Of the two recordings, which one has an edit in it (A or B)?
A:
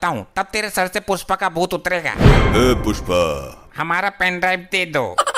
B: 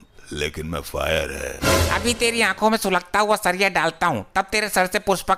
A